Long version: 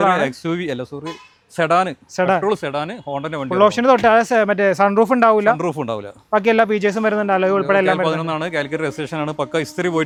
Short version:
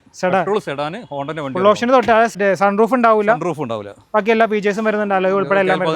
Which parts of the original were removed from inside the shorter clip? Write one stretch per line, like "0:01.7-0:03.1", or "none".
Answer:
0:04.3-0:04.5

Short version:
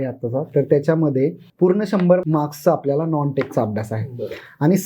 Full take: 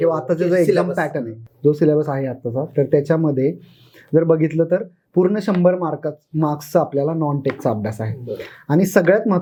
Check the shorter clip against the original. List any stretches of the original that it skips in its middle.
0:03.7-0:05.0
0:05.8-0:06.3

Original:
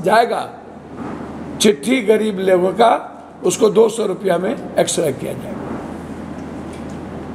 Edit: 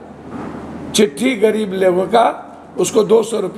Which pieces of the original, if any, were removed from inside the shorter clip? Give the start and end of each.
none

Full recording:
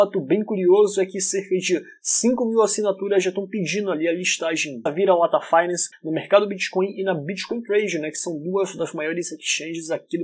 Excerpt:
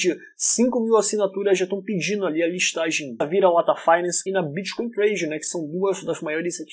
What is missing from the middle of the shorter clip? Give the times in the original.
0:05.9-0:07.0

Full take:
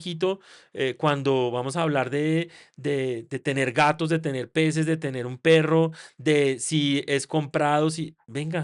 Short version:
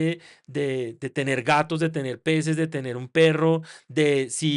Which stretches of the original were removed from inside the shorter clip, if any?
none

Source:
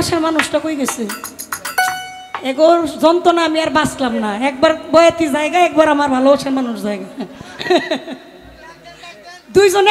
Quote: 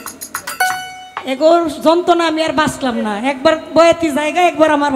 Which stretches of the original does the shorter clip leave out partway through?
none

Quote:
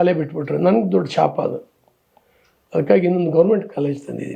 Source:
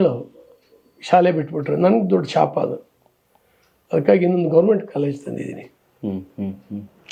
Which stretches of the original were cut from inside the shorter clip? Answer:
none

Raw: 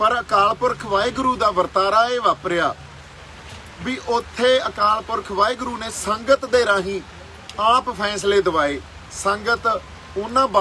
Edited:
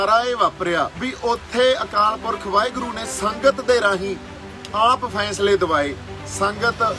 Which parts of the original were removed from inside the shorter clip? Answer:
0:02.8-0:03.8

